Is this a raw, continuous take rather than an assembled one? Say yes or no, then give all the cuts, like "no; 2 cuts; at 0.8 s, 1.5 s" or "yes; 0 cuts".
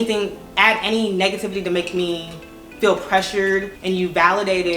no; 1 cut; at 3.7 s